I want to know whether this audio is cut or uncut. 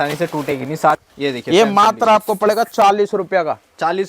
cut